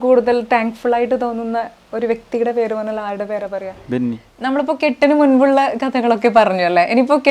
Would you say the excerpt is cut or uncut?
cut